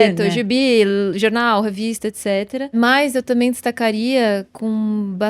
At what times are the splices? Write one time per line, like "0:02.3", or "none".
0:02.7

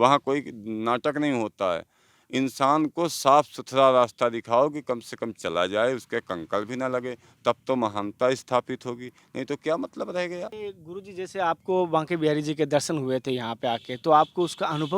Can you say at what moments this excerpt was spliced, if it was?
0:10.6

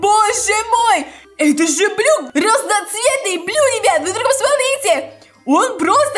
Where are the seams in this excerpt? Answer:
0:01.2
0:02.2

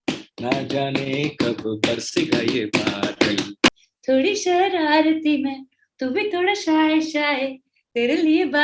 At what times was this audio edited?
0:03.7

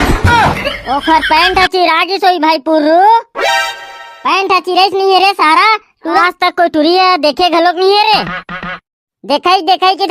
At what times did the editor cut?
0:06.2

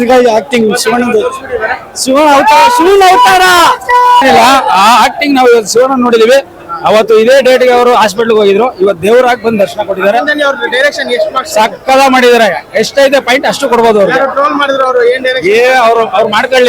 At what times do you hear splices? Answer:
0:04.2

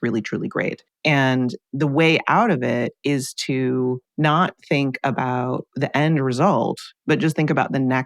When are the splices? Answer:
0:00.9
0:04.1
0:05.7
0:06.9

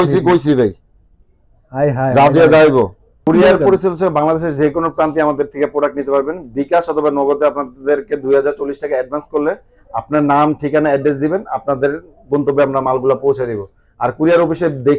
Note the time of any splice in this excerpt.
0:03.2

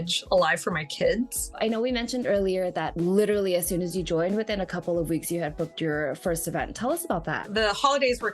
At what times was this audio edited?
0:01.5

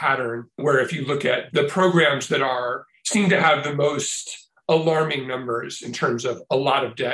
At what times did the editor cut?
0:01.4

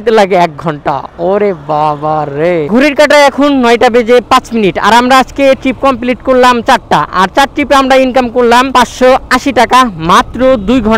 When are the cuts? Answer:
0:02.7

